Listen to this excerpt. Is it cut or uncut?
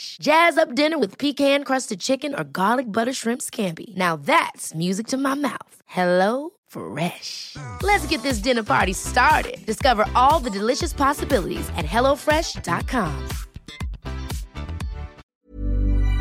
cut